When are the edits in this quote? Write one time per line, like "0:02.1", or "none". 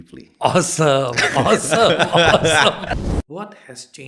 0:03.0